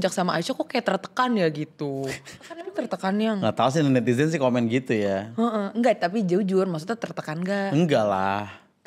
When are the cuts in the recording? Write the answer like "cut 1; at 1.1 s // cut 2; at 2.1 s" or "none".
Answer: cut 1; at 2.6 s